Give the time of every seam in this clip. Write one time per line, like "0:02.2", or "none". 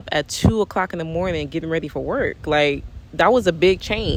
none